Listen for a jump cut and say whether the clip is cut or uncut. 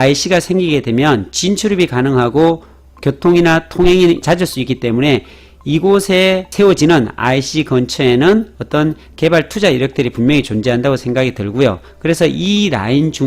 uncut